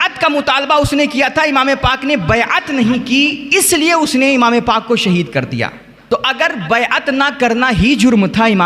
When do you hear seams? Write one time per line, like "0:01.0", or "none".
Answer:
0:05.9